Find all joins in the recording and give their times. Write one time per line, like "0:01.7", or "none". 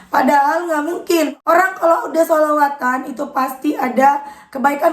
0:01.3